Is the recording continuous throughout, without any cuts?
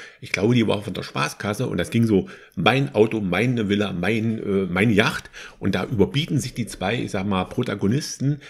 yes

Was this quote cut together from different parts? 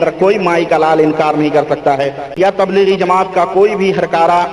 yes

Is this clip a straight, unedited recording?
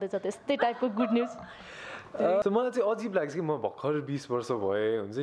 no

